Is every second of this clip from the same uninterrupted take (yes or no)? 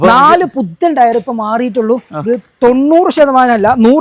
yes